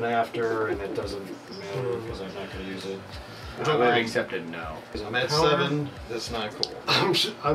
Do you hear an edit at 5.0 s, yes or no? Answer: yes